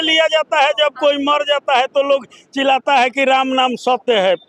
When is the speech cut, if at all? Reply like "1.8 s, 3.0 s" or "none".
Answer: none